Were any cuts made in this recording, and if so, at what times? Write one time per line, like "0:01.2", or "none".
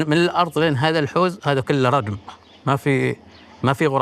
none